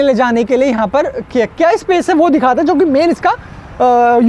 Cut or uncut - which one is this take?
uncut